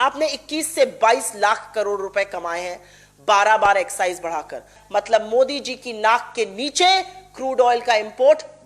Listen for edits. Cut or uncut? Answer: cut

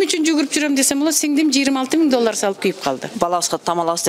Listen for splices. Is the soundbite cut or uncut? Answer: cut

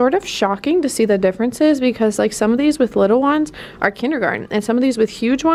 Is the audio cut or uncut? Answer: uncut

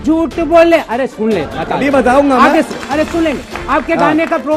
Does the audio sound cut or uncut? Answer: uncut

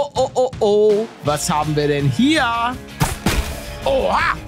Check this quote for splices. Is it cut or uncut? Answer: cut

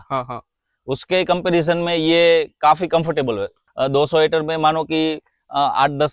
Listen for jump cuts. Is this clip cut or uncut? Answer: cut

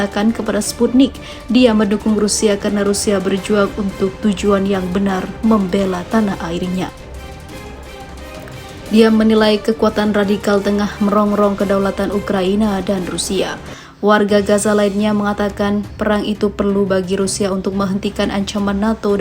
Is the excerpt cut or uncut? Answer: cut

